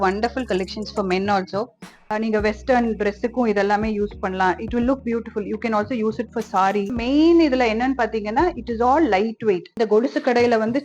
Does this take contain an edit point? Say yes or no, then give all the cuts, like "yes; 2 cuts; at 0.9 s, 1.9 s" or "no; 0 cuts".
yes; 2 cuts; at 2.1 s, 9.8 s